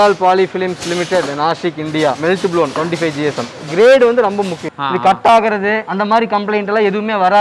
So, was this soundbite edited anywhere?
yes; 1 cut; at 4.6 s

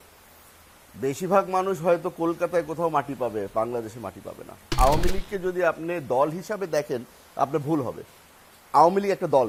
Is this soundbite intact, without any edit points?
yes; 0 cuts

